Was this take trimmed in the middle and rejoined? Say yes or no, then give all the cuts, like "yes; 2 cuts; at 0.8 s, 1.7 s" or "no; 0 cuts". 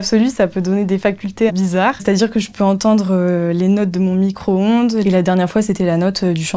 yes; 2 cuts; at 1.7 s, 5.0 s